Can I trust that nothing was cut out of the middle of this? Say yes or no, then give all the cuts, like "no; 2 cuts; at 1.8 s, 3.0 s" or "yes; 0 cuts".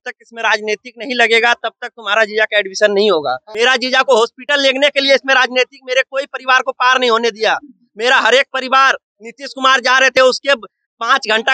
no; 1 cut; at 3.4 s